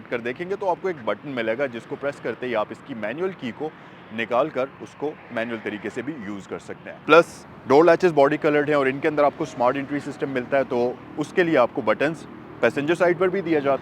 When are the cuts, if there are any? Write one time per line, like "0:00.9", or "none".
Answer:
0:06.9